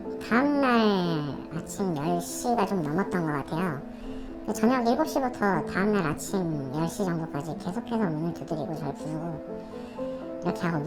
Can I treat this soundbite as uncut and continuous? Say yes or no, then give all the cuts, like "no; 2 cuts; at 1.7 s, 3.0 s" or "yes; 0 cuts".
yes; 0 cuts